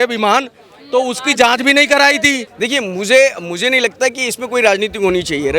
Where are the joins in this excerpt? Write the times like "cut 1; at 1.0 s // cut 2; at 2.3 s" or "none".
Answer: cut 1; at 2.5 s